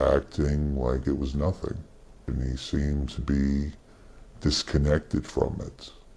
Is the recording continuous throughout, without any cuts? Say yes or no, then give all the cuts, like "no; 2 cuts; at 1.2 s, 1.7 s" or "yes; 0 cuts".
yes; 0 cuts